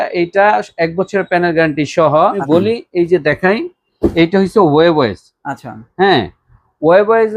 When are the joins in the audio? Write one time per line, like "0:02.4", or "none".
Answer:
0:02.4